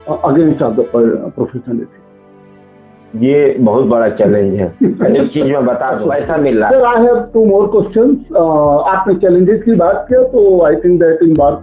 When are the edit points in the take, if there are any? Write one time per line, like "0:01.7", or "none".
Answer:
0:06.0